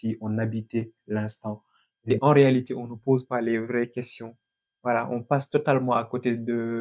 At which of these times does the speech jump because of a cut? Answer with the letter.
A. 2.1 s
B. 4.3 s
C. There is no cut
A